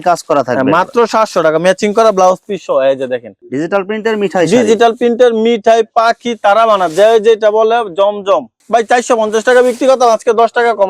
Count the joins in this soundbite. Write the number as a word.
two